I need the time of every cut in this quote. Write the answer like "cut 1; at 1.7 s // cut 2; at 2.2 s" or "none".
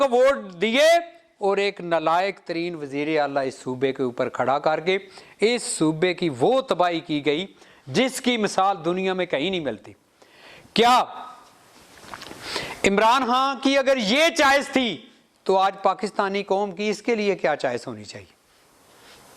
none